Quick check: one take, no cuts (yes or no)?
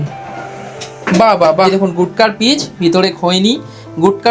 no